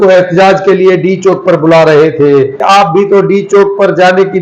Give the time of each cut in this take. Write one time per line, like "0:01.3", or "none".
0:02.6